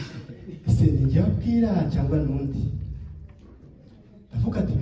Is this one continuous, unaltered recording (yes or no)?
yes